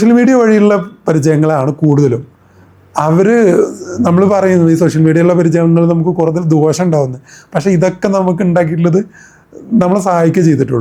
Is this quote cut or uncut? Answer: uncut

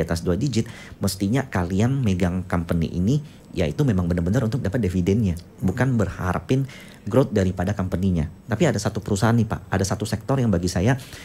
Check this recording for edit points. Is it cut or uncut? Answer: uncut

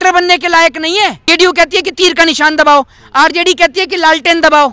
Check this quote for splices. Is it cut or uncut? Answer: cut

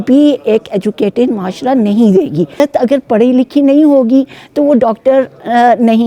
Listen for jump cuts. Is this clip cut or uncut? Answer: cut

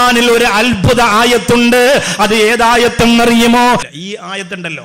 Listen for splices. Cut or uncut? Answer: cut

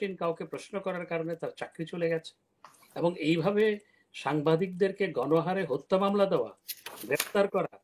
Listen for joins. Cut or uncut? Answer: uncut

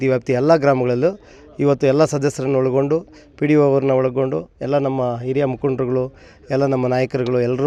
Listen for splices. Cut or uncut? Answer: uncut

